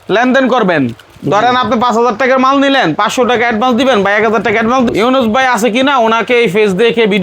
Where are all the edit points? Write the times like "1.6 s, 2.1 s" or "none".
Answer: 4.9 s